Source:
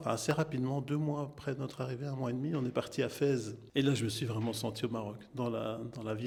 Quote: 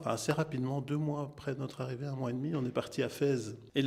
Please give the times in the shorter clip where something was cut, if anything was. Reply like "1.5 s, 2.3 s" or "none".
none